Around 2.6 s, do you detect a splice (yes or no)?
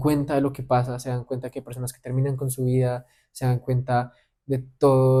no